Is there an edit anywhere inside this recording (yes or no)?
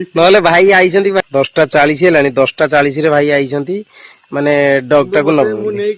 yes